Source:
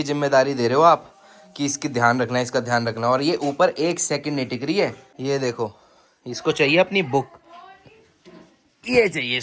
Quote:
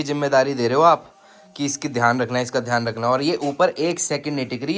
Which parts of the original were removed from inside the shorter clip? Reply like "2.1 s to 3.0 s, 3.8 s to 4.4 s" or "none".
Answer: none